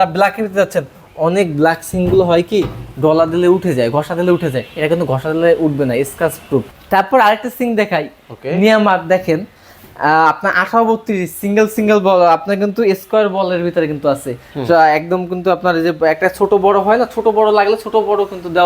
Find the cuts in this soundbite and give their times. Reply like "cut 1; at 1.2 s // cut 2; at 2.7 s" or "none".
cut 1; at 6.7 s